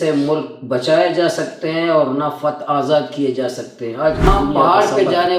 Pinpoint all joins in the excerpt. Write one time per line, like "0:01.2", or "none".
0:04.3